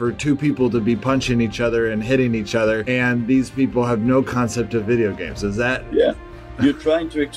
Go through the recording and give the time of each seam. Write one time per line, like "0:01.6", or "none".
none